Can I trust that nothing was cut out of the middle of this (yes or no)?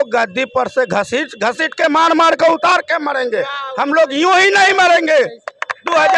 yes